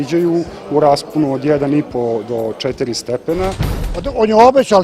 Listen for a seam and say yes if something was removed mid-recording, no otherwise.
yes